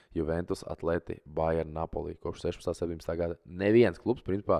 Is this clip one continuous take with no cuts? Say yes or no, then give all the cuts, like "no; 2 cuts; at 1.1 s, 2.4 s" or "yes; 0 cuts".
yes; 0 cuts